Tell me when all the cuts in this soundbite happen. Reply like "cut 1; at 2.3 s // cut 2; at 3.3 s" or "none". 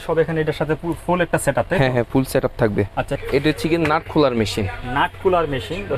cut 1; at 3.2 s